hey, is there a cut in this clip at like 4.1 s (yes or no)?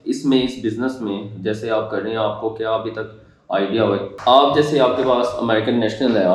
yes